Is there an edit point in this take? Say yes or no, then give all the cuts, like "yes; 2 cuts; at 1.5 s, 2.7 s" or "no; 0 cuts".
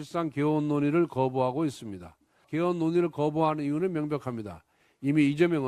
yes; 1 cut; at 2.5 s